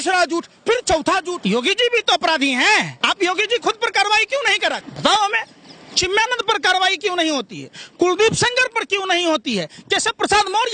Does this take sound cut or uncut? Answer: cut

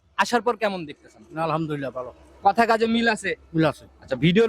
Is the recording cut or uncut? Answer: uncut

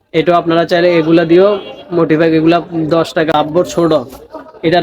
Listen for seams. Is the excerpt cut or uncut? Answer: cut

